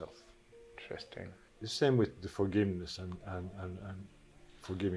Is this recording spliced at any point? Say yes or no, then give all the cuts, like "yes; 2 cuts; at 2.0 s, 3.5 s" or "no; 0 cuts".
yes; 1 cut; at 1.5 s